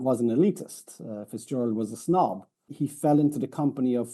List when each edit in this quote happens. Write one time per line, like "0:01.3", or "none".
0:02.6